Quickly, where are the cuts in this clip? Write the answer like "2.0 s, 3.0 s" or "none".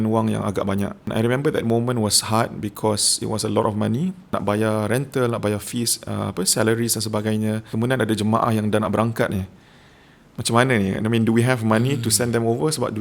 1.1 s, 4.3 s, 7.7 s